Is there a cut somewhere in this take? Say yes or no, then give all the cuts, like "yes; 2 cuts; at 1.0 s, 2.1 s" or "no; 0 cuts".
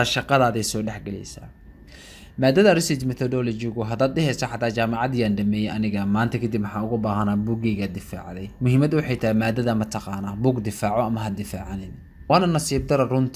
yes; 1 cut; at 12.3 s